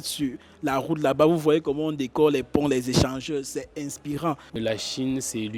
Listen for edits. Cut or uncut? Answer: cut